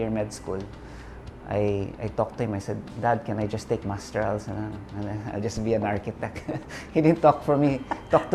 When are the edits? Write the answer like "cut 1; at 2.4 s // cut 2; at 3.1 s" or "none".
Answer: none